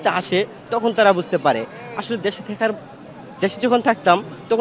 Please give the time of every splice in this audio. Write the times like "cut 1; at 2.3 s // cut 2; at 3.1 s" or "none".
none